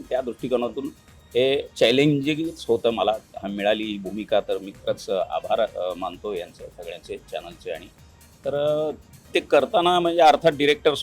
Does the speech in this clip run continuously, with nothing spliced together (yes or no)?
yes